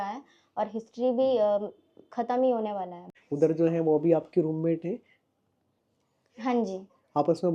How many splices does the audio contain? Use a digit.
1